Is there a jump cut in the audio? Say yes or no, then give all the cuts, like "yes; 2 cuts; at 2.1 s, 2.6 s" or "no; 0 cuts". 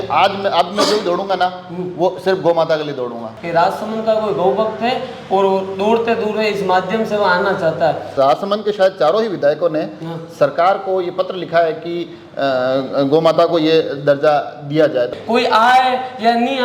yes; 3 cuts; at 3.3 s, 8.1 s, 15.1 s